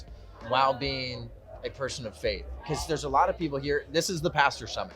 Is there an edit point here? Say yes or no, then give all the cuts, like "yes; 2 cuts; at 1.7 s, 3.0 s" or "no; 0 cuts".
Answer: no; 0 cuts